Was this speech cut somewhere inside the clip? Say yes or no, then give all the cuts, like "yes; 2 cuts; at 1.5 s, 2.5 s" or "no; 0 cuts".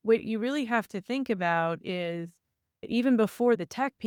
no; 0 cuts